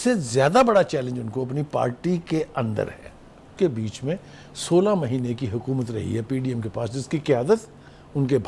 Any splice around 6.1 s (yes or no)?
no